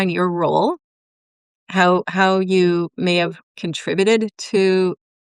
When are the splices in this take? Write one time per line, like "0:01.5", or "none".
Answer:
none